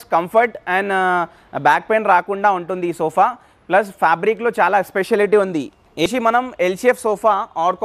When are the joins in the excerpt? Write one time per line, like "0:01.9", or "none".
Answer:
0:06.1